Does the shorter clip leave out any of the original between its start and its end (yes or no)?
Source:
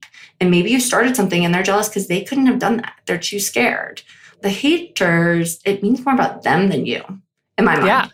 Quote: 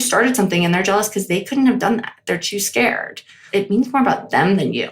yes